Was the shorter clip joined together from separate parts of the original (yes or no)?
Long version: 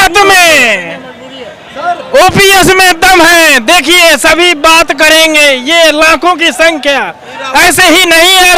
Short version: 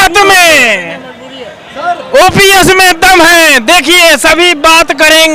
no